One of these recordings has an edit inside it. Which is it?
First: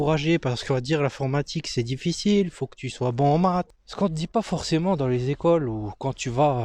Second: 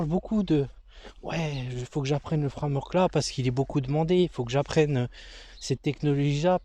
first; 1 cut; at 3.8 s

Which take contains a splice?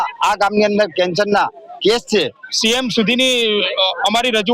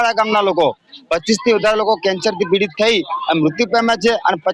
first; 1 cut; at 2.4 s

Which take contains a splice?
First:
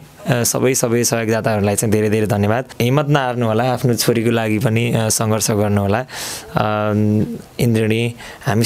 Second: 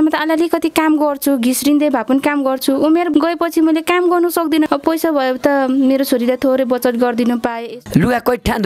second; 3 cuts; at 3.1 s, 4.6 s, 7.7 s

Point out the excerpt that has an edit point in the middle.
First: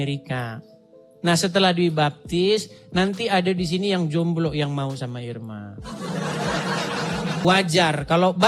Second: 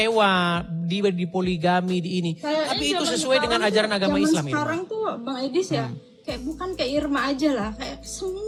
first; 1 cut; at 7.4 s

